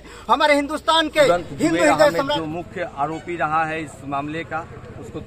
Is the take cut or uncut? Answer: cut